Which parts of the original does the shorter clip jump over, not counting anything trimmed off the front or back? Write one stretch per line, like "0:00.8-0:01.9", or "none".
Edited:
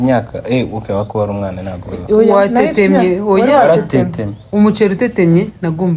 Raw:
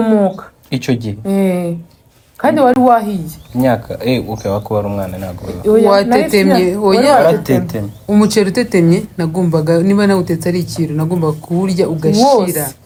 none